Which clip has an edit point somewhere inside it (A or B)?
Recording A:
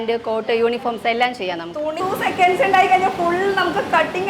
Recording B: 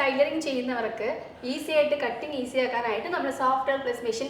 A